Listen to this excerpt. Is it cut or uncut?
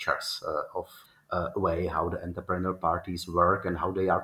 cut